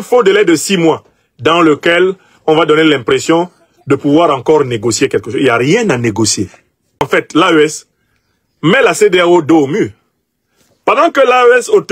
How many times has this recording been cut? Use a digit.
1